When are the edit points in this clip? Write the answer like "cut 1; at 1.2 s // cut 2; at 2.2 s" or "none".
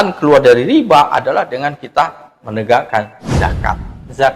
none